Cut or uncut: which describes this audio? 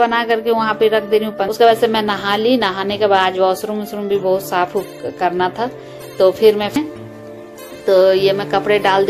cut